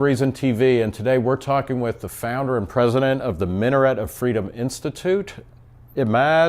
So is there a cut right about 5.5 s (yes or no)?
no